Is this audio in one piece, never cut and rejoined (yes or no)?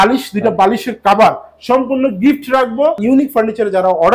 no